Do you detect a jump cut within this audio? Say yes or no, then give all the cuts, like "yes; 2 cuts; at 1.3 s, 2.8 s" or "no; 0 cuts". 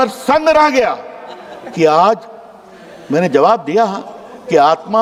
no; 0 cuts